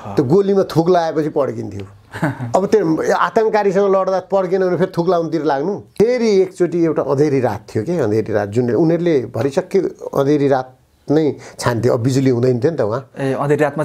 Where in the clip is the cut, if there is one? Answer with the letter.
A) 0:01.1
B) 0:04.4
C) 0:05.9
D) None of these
C